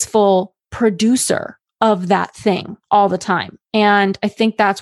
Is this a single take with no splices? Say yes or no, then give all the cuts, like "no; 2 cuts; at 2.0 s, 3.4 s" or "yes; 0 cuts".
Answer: no; 1 cut; at 2.7 s